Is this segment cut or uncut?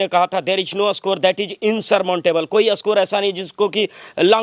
uncut